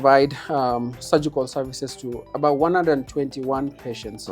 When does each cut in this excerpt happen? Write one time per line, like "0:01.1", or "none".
0:02.3